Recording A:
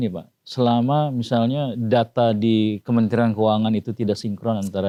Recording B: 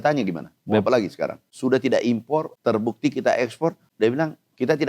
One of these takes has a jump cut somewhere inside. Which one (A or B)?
B